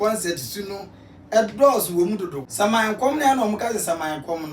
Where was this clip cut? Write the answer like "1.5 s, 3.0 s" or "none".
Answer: 2.4 s